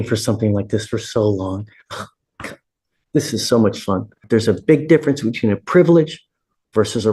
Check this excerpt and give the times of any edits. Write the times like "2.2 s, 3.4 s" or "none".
4.2 s